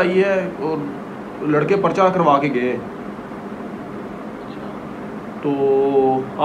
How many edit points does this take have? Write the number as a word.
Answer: zero